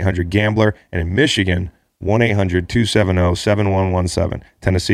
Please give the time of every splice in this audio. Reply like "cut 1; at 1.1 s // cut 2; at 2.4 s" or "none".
none